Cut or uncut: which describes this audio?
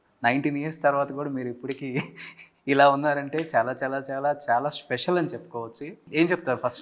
cut